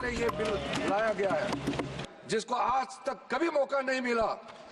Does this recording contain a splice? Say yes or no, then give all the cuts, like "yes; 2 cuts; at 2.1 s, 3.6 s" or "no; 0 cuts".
yes; 1 cut; at 2.0 s